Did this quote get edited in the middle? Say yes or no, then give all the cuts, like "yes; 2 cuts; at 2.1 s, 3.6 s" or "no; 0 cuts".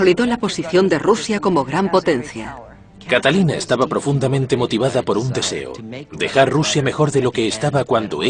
yes; 1 cut; at 6.8 s